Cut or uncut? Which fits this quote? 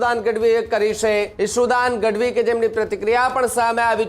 cut